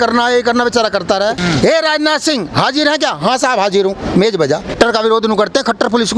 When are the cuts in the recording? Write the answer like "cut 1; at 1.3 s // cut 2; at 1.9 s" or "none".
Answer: cut 1; at 1.4 s // cut 2; at 4.7 s